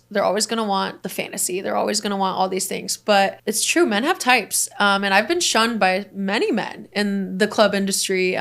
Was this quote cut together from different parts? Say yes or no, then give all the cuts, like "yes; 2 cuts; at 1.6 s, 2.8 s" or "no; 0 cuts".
yes; 2 cuts; at 1.0 s, 3.4 s